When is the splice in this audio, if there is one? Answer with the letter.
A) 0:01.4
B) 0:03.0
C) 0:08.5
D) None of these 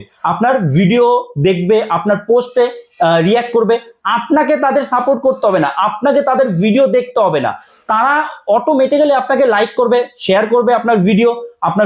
D